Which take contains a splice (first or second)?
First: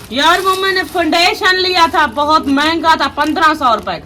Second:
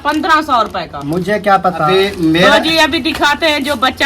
second